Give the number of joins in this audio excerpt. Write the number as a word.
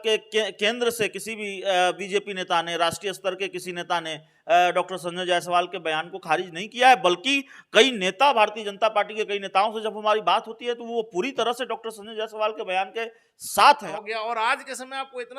one